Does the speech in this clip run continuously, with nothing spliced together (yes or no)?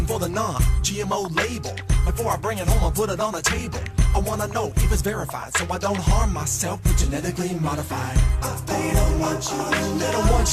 no